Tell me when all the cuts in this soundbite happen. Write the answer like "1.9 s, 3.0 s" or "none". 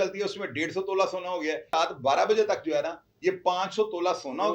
1.7 s